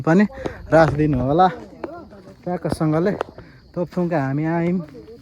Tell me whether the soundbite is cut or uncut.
uncut